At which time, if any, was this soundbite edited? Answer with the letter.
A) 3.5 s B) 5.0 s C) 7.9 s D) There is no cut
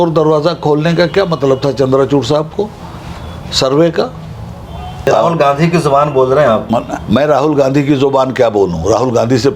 B